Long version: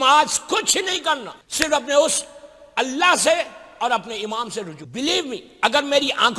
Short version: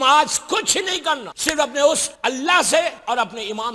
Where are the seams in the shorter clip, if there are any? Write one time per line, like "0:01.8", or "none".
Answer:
0:01.3
0:02.1
0:03.0